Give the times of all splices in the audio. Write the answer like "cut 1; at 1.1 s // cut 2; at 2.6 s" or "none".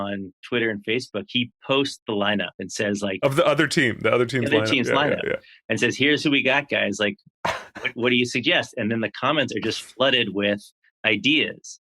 cut 1; at 3.2 s